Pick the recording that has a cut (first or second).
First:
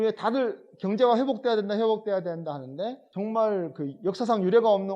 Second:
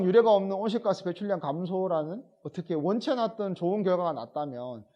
first